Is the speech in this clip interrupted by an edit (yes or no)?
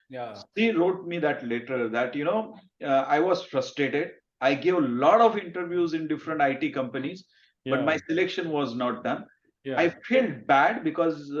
no